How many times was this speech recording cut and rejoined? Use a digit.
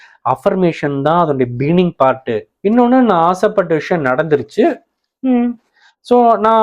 1